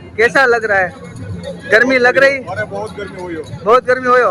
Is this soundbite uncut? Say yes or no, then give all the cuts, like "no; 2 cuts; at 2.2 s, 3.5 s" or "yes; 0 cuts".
yes; 0 cuts